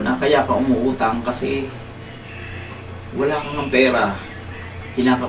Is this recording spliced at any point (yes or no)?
no